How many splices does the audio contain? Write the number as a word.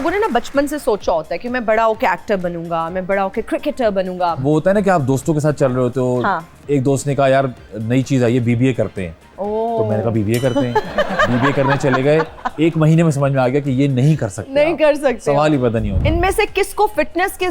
two